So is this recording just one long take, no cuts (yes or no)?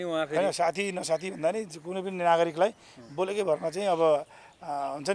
yes